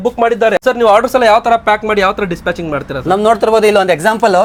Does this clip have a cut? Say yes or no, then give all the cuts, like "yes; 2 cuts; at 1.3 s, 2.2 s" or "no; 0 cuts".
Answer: no; 0 cuts